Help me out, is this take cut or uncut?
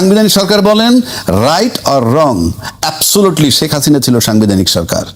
uncut